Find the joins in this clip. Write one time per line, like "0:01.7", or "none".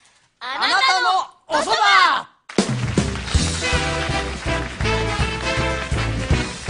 0:01.1